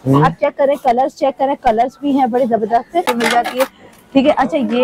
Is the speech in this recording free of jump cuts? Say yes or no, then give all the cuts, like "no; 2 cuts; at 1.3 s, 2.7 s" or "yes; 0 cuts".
no; 1 cut; at 3.1 s